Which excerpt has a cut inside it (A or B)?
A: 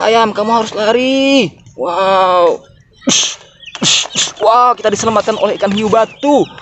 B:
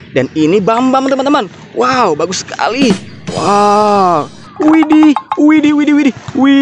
B